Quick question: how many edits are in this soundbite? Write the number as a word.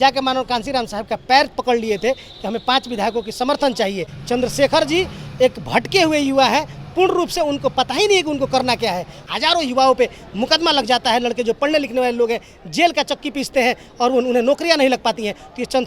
two